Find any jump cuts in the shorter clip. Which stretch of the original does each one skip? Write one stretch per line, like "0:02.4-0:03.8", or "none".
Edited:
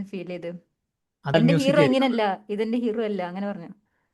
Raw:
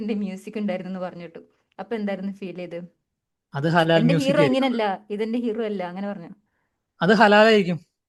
0:03.6-0:03.9